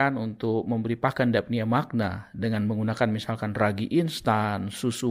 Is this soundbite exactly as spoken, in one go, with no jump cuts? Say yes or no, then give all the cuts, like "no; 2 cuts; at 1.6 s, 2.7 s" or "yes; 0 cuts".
yes; 0 cuts